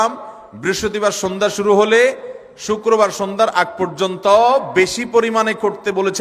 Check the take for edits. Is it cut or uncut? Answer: uncut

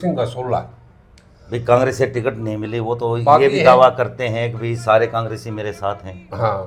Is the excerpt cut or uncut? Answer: uncut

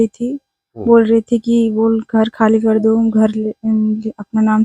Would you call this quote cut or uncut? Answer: uncut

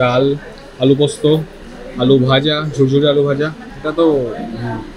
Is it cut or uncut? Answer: uncut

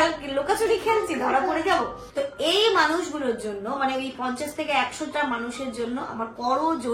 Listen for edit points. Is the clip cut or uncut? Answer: cut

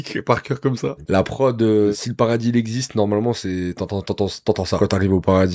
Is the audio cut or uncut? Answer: cut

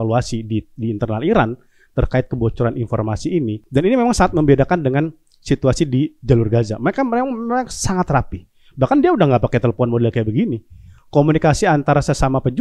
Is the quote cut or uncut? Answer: cut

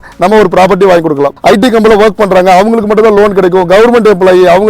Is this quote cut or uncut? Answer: cut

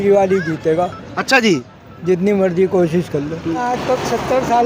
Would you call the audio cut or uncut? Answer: cut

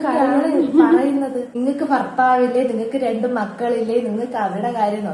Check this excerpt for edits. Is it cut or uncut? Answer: cut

